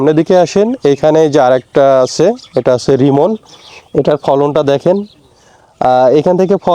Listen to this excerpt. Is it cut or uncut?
uncut